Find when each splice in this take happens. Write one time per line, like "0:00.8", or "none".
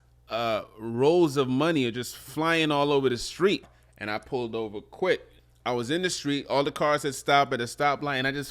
0:03.7
0:05.3